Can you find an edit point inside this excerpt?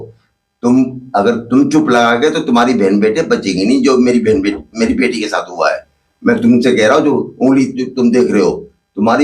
no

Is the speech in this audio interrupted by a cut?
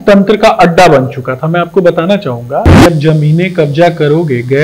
yes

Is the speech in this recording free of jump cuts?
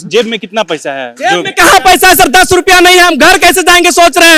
yes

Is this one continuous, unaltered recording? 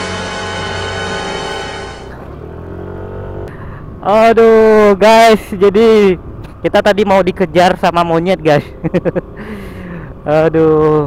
no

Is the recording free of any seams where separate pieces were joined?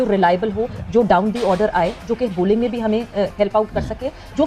yes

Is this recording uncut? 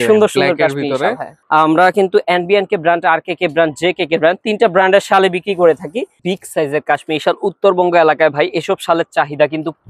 no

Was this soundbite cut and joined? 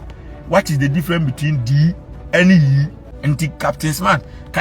yes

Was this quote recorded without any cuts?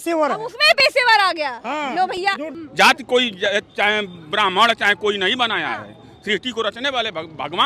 no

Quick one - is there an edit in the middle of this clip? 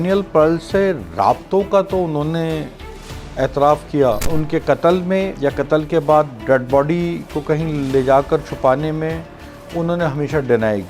yes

